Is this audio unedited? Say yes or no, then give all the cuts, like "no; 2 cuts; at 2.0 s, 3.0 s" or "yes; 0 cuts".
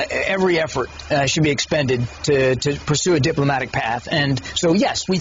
no; 1 cut; at 1.5 s